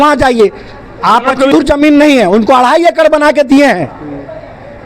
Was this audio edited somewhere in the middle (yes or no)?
yes